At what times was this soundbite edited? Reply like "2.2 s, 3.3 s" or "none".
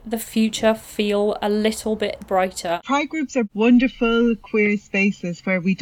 3.0 s